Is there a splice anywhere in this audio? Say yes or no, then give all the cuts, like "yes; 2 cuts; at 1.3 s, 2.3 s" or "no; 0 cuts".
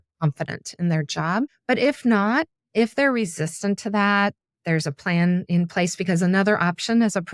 yes; 2 cuts; at 1.6 s, 2.6 s